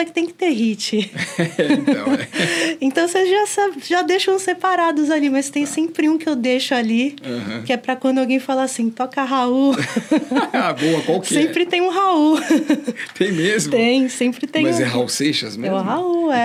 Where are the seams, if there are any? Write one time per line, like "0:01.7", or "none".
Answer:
none